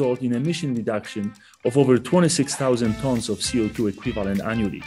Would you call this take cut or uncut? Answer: uncut